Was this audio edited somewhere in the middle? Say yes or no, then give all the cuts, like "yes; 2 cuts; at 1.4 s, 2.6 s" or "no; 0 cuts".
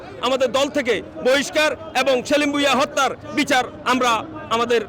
no; 0 cuts